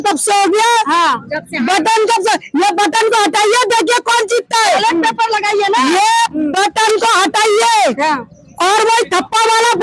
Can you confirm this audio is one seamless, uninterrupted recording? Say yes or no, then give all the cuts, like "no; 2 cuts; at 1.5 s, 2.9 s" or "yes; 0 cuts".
yes; 0 cuts